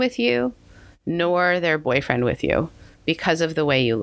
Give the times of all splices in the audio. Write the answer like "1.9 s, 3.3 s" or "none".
none

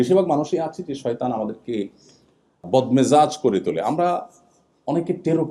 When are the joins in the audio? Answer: 2.6 s

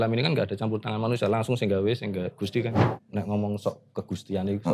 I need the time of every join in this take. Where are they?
2.9 s

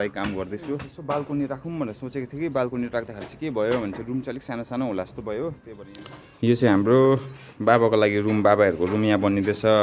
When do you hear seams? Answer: 0.9 s, 5.7 s

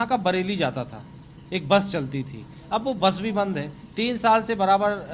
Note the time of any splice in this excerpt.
none

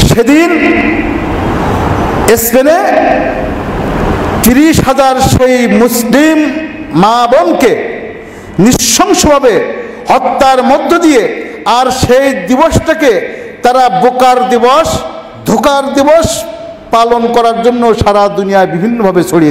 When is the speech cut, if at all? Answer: none

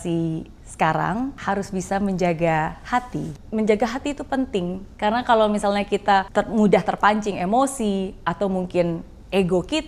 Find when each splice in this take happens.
1.4 s, 3.4 s, 4.8 s, 6.3 s

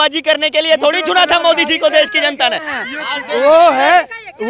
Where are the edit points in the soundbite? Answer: none

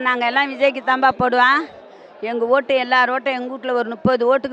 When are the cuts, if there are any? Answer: none

